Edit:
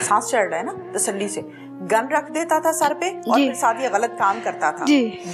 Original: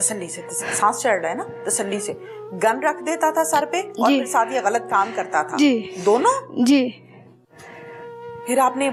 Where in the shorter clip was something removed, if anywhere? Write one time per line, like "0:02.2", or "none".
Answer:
none